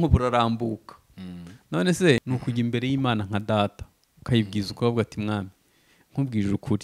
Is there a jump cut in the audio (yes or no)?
yes